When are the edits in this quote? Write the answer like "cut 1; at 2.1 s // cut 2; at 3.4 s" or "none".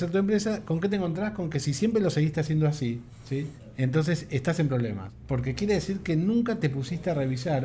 cut 1; at 3.4 s // cut 2; at 5.1 s